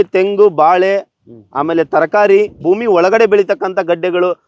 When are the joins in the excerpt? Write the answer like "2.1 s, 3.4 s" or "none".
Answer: 2.6 s